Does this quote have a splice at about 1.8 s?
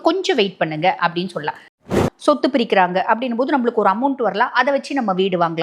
yes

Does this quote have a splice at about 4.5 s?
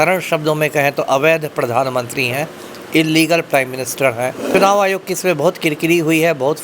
yes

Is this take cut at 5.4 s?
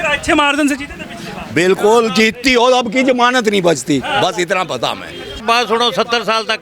yes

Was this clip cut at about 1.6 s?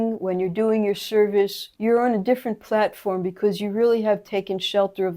yes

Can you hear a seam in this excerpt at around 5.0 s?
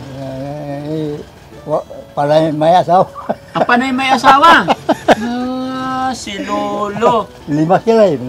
no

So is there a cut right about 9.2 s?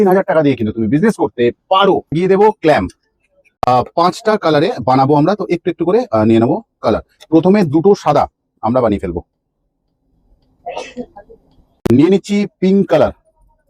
no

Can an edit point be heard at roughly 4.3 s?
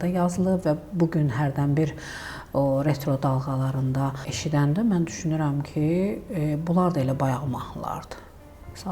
yes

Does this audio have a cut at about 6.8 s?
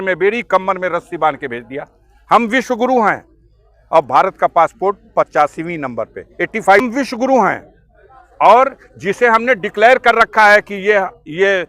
yes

